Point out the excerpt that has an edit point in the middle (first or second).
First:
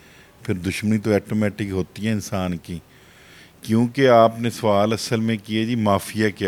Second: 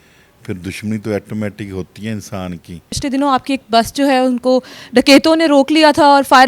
second